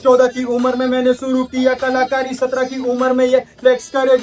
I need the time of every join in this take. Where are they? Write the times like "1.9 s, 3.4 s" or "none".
none